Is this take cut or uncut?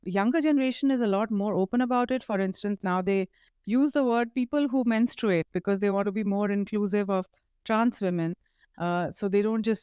uncut